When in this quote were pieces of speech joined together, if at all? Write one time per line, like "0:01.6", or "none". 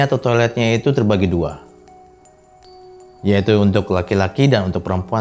none